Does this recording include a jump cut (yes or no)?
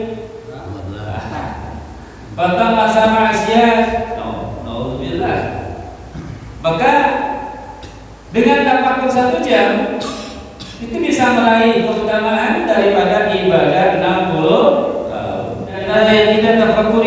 yes